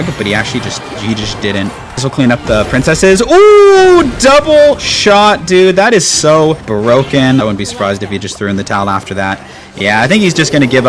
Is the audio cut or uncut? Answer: cut